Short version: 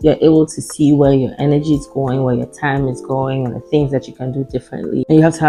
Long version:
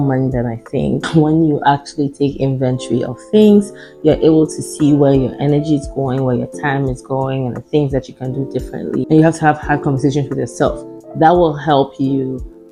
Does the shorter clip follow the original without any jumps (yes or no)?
yes